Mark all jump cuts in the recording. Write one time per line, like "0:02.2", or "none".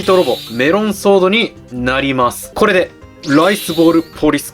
0:02.4